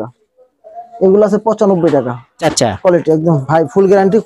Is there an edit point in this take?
yes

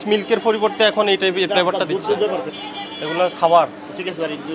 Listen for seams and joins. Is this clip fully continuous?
no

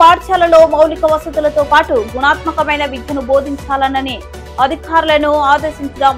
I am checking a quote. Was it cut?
no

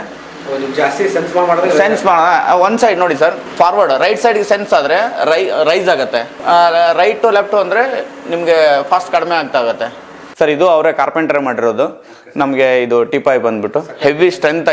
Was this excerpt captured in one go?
no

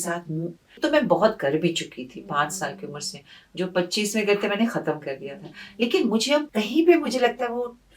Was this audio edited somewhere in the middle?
yes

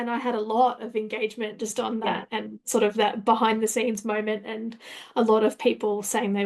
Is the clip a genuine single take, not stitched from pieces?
yes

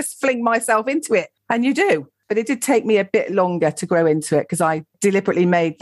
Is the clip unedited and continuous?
no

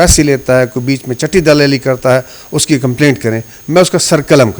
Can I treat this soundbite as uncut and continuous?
yes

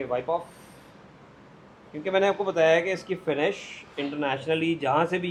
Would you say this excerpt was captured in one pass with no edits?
yes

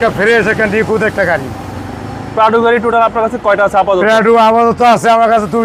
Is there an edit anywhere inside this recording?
no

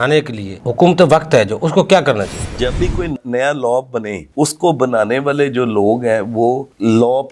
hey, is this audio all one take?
no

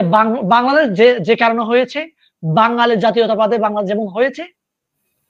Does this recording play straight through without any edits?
yes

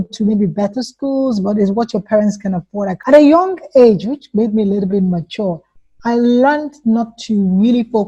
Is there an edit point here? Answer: yes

